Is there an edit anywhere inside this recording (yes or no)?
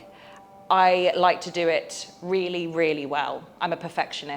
no